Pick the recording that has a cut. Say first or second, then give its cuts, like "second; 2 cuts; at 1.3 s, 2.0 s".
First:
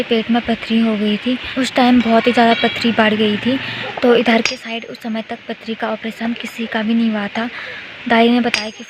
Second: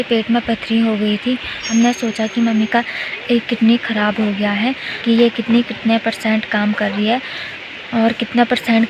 second; 2 cuts; at 1.6 s, 4.9 s